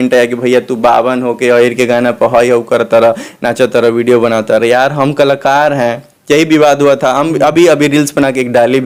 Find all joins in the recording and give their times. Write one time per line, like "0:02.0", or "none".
none